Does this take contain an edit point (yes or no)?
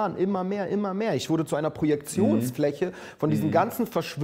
yes